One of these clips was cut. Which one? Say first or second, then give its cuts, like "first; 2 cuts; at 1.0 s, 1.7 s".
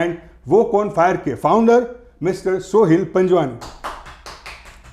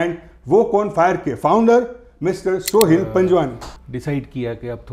second; 1 cut; at 3.7 s